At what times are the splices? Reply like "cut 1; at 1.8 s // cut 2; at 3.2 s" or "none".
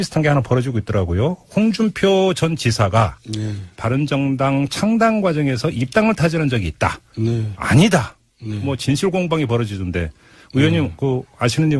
none